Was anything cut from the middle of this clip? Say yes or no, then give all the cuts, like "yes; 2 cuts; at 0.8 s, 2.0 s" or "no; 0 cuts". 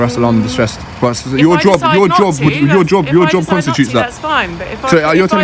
yes; 1 cut; at 1.7 s